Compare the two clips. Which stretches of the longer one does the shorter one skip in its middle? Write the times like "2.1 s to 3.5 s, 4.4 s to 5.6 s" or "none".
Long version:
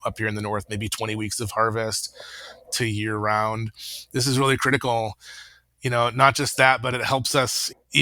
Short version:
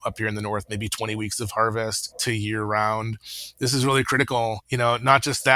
2.1 s to 2.6 s, 5.2 s to 5.8 s